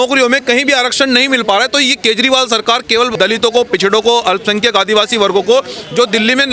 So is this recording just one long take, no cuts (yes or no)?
yes